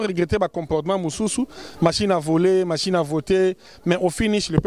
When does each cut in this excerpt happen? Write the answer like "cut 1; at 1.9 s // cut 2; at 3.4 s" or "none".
none